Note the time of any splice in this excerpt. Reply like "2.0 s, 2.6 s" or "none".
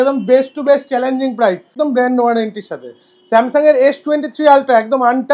1.7 s